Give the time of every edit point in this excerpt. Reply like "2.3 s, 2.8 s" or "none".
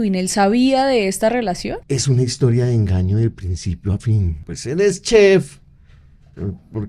1.8 s, 4.5 s